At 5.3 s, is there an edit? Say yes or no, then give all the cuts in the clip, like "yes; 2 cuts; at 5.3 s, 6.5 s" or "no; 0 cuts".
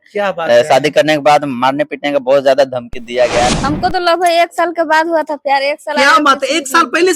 no; 1 cut; at 3.5 s